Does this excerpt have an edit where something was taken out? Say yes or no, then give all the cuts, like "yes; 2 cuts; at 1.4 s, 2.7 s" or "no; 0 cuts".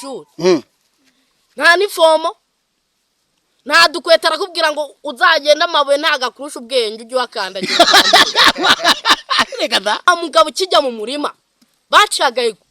yes; 1 cut; at 10.1 s